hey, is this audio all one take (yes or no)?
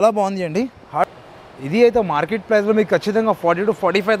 no